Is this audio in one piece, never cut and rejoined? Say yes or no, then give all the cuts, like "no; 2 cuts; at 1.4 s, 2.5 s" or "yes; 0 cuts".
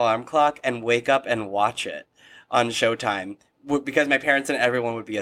yes; 0 cuts